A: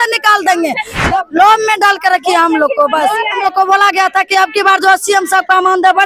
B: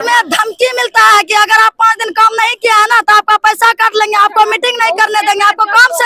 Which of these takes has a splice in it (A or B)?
A